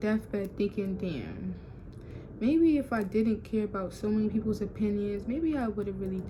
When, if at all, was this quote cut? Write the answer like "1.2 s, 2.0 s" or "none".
none